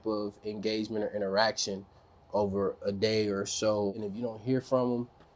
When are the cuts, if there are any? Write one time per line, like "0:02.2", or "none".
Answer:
0:04.0